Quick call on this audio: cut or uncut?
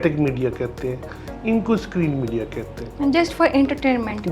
uncut